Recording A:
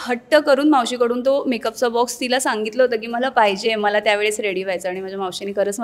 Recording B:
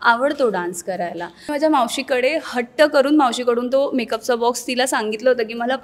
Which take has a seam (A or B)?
B